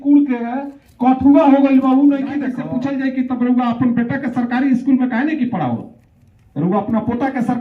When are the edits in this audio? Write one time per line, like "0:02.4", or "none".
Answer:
0:02.5